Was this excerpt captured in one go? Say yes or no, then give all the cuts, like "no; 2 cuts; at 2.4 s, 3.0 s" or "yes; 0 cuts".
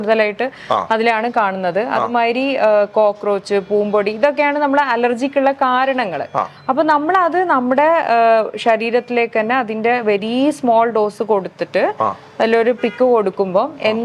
yes; 0 cuts